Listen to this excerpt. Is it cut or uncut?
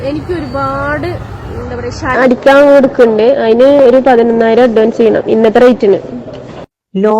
cut